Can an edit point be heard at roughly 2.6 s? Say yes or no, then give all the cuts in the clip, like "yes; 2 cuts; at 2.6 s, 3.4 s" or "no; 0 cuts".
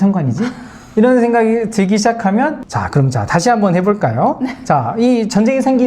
yes; 1 cut; at 2.6 s